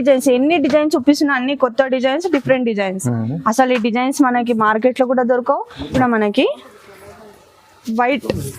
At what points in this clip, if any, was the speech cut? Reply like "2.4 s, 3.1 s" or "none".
5.9 s